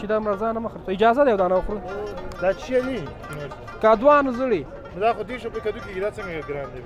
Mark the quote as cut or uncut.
uncut